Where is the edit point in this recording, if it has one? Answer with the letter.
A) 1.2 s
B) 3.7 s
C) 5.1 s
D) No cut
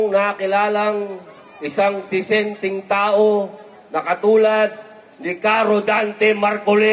D